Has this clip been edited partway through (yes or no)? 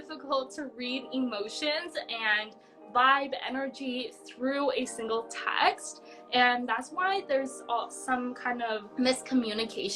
no